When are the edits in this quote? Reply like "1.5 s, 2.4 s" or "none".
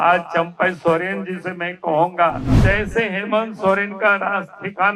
2.6 s

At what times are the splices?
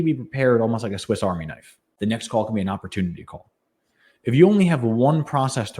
1.9 s

